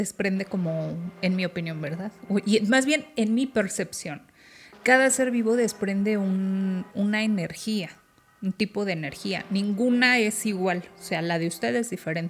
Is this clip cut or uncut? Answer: uncut